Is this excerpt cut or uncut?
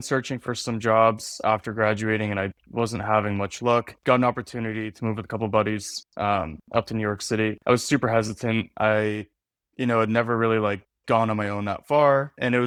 uncut